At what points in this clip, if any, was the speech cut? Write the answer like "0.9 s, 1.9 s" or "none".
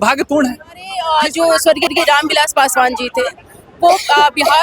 0.9 s

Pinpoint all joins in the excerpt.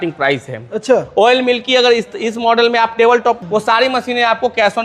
3.4 s

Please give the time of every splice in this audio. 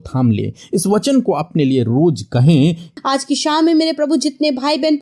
2.9 s

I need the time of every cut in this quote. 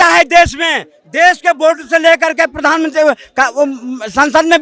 none

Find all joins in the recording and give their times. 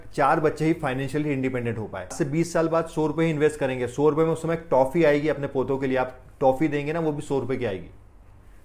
2.2 s

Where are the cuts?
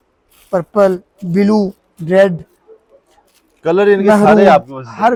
none

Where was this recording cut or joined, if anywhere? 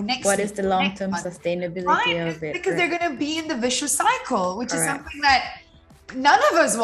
none

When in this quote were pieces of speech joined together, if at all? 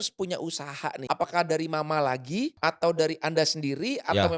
1.0 s, 2.5 s

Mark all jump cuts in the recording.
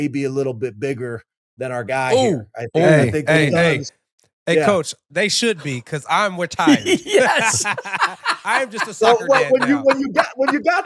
none

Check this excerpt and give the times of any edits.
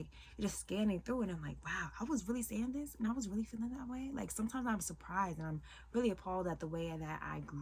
none

